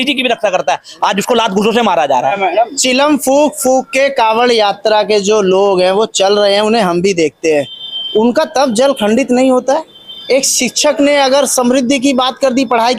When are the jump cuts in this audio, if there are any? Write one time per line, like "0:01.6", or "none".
0:02.4